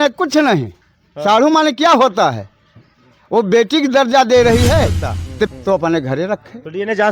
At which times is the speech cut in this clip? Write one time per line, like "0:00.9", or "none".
0:05.5